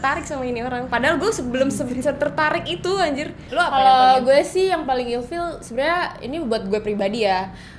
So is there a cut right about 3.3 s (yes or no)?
yes